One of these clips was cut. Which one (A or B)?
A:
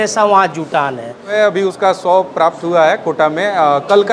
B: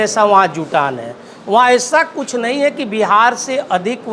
A